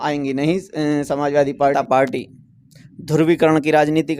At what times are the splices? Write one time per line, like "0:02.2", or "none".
0:01.7